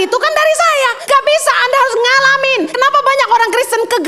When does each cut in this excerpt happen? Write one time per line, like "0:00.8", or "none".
0:01.0
0:02.7